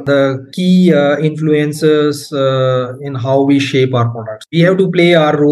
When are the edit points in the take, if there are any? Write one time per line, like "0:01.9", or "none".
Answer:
0:04.4

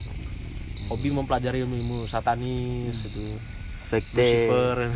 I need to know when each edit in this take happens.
none

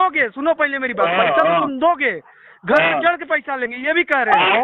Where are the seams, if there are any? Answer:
none

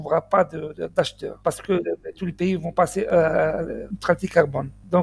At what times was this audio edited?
0:01.2
0:03.9

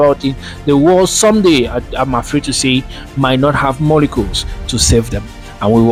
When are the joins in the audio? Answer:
none

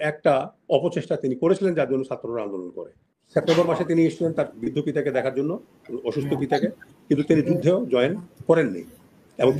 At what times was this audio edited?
0:03.1

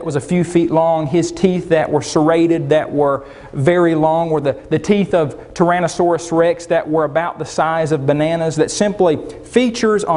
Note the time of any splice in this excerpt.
0:03.0

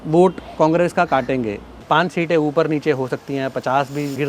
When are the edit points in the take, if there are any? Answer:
0:01.7

